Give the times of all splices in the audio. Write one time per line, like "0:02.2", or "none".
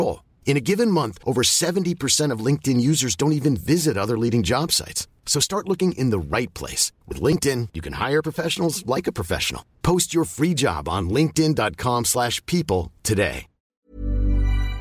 0:13.6